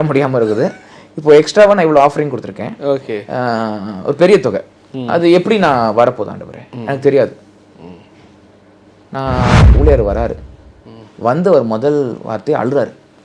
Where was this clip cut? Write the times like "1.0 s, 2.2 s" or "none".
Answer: 9.8 s